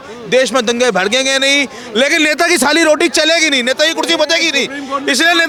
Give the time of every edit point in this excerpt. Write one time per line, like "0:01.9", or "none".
none